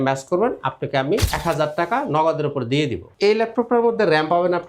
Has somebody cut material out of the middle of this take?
yes; 2 cuts; at 1.3 s, 3.1 s

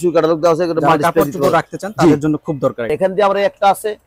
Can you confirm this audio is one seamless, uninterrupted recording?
no; 1 cut; at 2.9 s

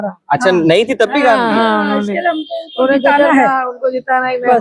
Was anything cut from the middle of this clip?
no; 0 cuts

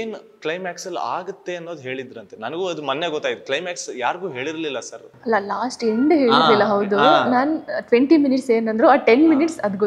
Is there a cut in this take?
no; 0 cuts

